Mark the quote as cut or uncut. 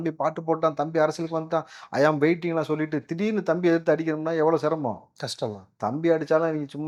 uncut